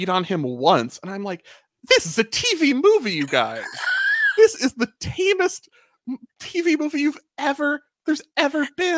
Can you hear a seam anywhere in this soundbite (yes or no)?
no